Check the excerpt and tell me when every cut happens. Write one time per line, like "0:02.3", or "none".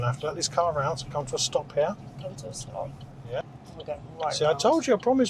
0:03.4